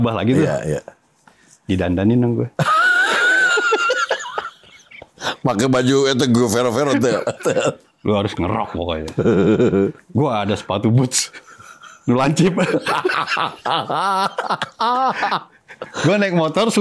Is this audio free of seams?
yes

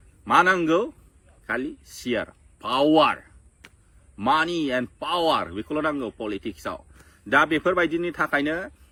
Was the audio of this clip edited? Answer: no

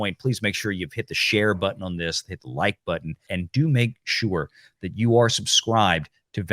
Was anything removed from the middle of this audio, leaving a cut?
yes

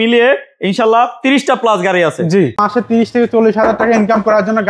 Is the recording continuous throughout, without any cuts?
no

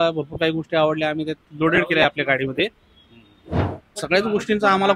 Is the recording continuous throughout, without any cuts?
no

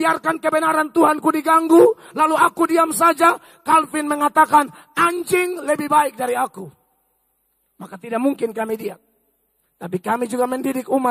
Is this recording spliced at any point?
no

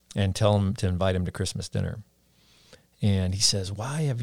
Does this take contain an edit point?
no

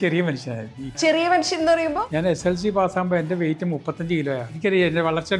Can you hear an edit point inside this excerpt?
yes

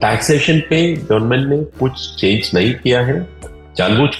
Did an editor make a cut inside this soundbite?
no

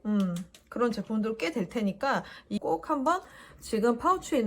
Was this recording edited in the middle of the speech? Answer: yes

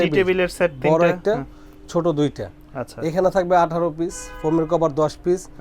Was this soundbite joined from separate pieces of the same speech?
no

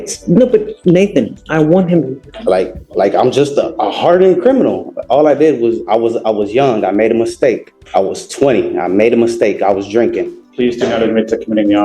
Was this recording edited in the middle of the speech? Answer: yes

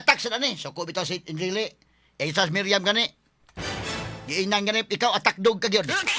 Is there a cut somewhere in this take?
no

